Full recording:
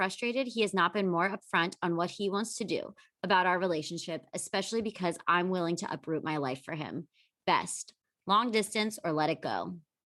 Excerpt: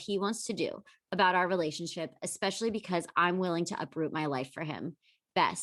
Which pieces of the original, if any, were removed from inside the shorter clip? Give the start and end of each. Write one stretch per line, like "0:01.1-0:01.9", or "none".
none

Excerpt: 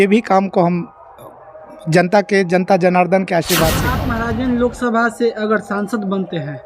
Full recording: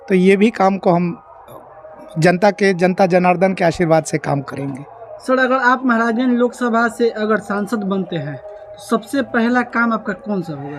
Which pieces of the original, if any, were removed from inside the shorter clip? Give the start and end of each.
0:04.3-0:05.8

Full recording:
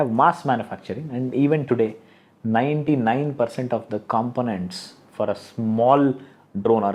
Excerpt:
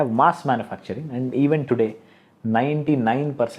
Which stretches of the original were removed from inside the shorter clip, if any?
none

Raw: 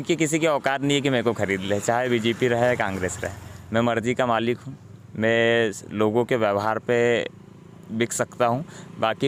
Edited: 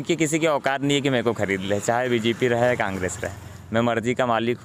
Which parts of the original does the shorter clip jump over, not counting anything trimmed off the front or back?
none

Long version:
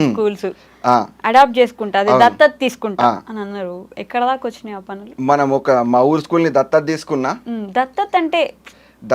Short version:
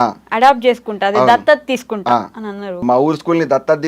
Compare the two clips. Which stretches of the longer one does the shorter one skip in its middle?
0:03.7-0:05.9

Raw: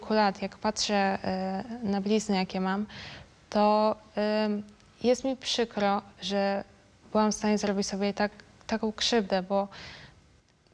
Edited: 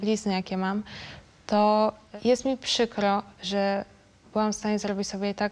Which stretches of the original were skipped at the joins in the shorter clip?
0:04.1-0:04.8

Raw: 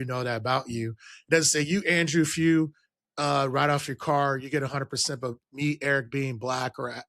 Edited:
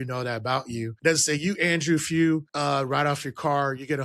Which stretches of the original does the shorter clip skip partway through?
0:00.9-0:01.2
0:02.8-0:03.1

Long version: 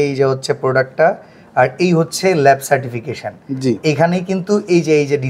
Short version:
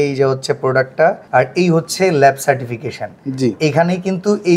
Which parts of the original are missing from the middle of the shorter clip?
0:01.2-0:01.5

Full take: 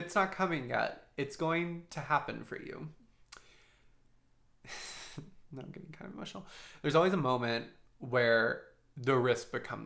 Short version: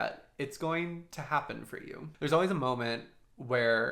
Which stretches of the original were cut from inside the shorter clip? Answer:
0:02.8-0:06.6

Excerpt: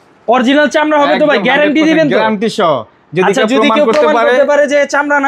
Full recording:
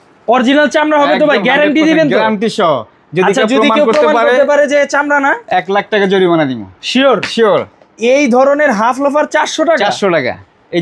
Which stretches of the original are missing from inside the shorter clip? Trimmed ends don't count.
none

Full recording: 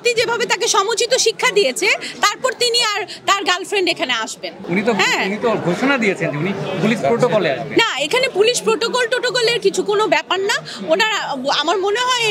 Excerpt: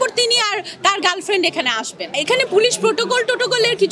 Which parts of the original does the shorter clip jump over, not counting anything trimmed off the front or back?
0:04.6-0:08.0

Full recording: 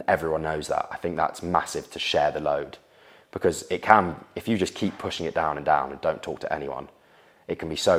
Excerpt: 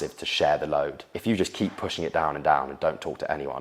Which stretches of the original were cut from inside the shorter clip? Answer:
0:02.8-0:04.3

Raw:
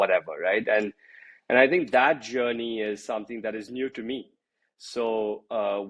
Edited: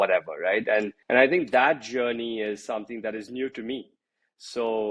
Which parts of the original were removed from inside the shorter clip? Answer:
0:01.0-0:01.4

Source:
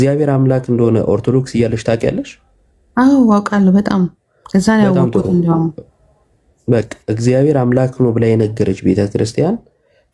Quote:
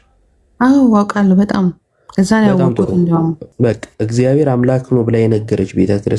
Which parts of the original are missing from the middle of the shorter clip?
0:05.8-0:06.5

